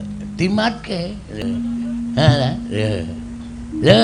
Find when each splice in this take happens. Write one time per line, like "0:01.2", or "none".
0:01.4